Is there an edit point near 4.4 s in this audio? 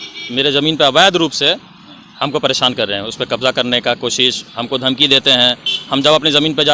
no; 0 cuts

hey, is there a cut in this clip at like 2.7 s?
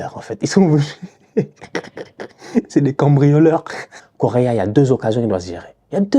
no; 1 cut; at 4.0 s

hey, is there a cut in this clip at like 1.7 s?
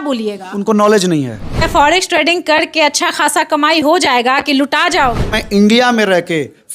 yes; 2 cuts; at 1.7 s, 5.4 s

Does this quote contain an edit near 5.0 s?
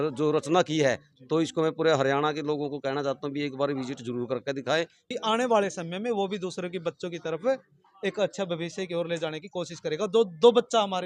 yes; 1 cut; at 5.0 s

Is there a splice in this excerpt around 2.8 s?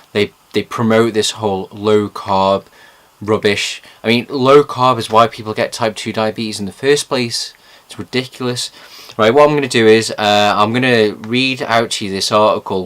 no; 1 cut; at 9.3 s

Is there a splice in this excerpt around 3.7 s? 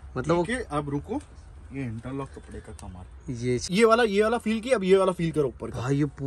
yes; 1 cut; at 3.7 s

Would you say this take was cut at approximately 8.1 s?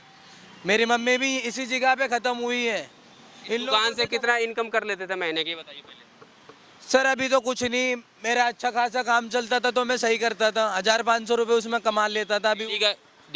no; 0 cuts

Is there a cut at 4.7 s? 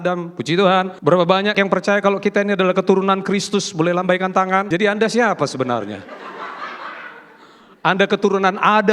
yes; 2 cuts; at 1.3 s, 4.7 s

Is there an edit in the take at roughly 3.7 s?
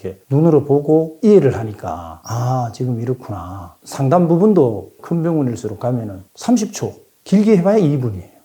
yes; 1 cut; at 3.7 s

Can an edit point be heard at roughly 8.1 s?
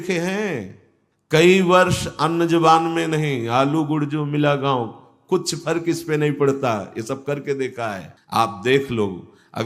yes; 1 cut; at 8.1 s

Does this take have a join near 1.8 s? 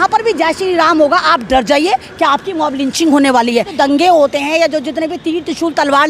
no; 1 cut; at 3.7 s

